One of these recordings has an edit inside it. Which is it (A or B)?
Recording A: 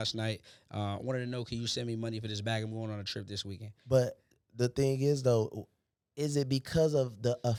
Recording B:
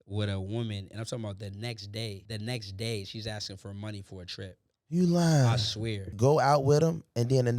B